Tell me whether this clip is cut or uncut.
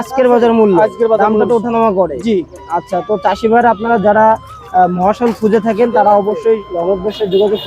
uncut